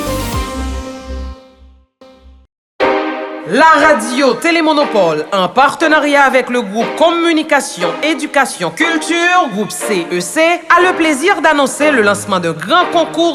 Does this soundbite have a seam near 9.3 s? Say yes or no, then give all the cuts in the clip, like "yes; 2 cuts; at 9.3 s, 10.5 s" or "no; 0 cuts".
no; 1 cut; at 2.2 s